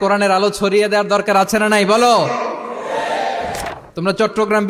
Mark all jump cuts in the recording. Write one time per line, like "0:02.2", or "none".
0:03.6